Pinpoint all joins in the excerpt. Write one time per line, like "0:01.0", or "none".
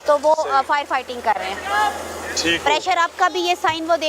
none